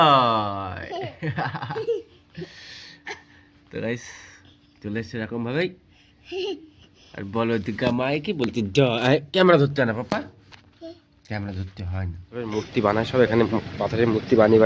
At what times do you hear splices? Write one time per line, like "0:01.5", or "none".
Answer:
0:12.5